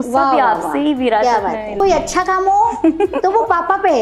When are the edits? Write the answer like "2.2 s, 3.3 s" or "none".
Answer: 1.8 s

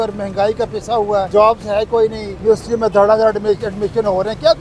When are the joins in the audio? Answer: 1.3 s, 2.3 s

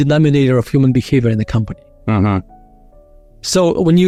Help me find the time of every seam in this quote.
none

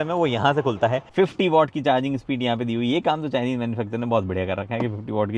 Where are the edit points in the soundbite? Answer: 1.1 s

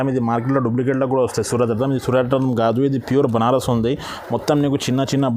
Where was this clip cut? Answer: none

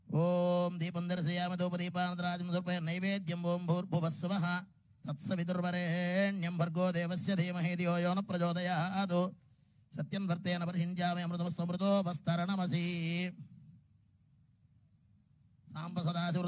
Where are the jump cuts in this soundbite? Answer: 10.3 s

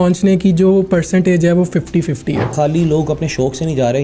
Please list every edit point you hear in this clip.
2.5 s

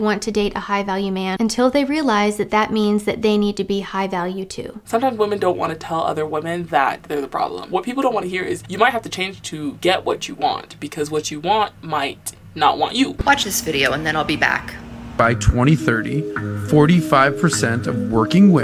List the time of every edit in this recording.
none

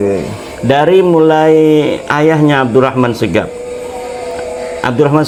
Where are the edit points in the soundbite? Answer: none

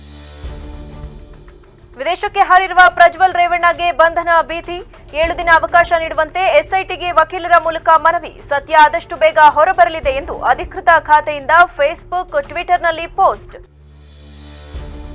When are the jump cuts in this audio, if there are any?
none

